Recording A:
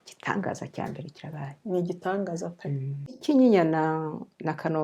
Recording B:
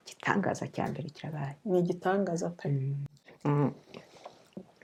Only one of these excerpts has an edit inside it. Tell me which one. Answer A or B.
A